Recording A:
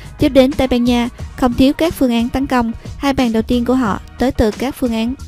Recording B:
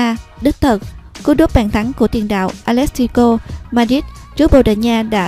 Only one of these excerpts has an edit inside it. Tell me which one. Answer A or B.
B